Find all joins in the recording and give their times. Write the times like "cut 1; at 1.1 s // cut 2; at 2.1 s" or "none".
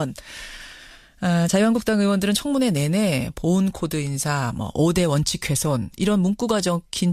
none